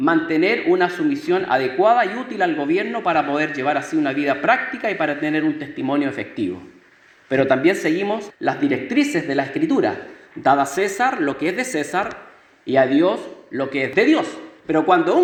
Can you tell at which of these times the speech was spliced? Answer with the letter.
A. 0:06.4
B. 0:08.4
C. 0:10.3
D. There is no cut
D